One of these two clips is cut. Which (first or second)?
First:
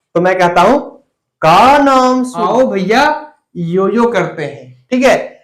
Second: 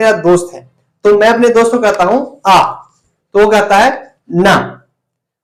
first